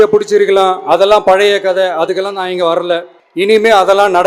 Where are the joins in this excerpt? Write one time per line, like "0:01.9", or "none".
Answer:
0:03.2